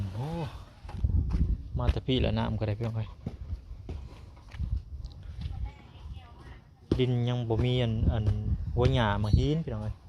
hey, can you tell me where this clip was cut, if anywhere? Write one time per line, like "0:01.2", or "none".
0:00.9